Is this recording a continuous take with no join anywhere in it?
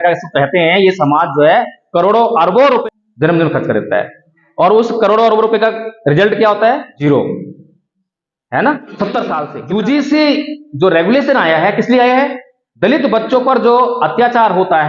no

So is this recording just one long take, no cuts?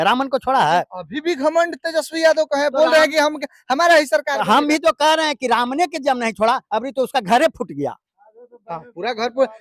yes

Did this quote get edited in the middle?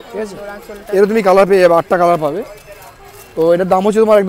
no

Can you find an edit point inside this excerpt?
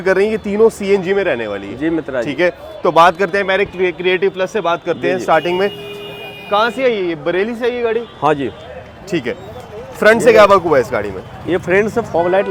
no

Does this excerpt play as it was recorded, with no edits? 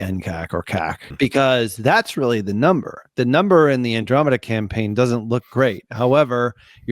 no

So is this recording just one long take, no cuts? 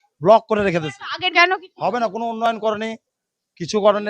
no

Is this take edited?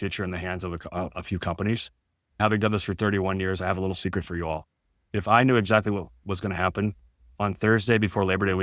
yes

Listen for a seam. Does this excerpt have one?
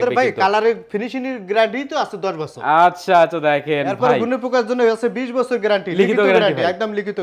no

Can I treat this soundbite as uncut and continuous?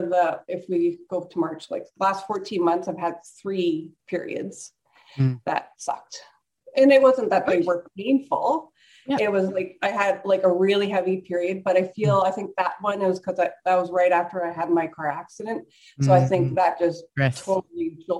yes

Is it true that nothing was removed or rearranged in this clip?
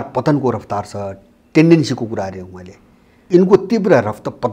no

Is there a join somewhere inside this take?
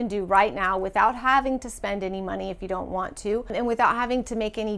yes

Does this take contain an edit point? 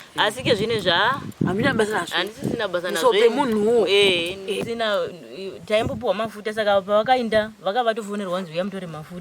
yes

